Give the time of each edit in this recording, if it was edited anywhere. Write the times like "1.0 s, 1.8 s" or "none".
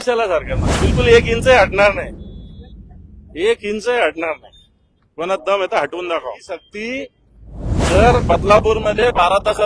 6.4 s